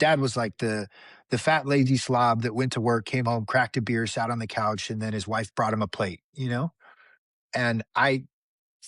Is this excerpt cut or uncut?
uncut